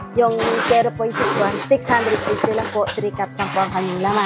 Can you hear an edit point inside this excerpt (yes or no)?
no